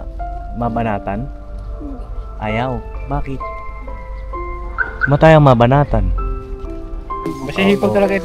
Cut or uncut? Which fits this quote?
cut